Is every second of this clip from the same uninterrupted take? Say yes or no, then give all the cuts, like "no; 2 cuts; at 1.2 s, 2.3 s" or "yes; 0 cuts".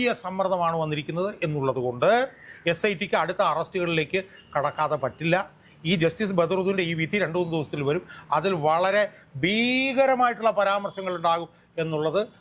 yes; 0 cuts